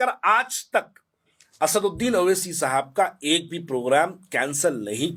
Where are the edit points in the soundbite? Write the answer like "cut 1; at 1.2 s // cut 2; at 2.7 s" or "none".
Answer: none